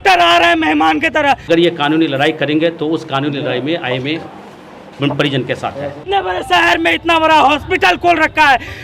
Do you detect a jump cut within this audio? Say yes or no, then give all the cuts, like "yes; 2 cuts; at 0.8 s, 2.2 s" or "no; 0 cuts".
yes; 2 cuts; at 1.4 s, 6.0 s